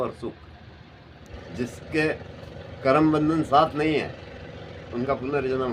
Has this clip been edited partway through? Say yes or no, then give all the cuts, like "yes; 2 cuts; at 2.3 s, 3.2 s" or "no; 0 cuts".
yes; 1 cut; at 1.4 s